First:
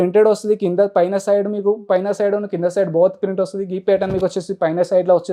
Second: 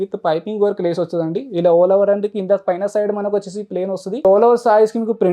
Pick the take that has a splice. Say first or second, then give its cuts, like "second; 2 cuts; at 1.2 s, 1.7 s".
second; 1 cut; at 4.2 s